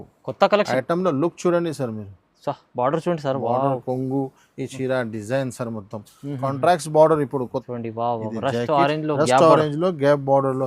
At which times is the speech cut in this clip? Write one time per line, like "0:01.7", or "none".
0:07.6